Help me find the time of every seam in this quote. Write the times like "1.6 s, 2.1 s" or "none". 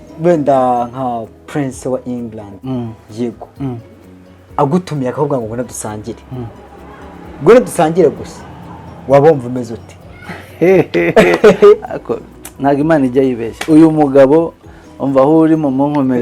2.5 s